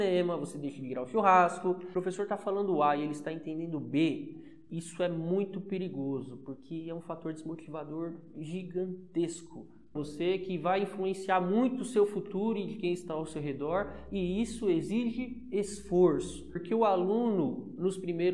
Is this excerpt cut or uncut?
cut